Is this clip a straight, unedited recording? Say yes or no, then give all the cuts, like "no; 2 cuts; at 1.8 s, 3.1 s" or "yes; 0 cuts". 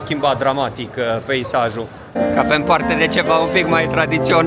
no; 1 cut; at 2.0 s